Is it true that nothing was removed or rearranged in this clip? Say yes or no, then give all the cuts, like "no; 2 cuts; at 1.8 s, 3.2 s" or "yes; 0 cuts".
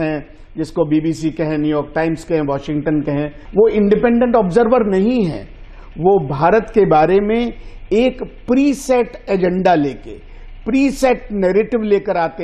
no; 1 cut; at 3.4 s